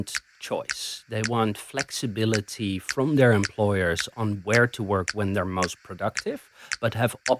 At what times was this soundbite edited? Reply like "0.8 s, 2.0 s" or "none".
none